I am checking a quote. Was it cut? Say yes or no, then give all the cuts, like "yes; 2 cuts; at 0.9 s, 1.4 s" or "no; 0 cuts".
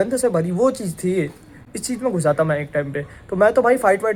no; 0 cuts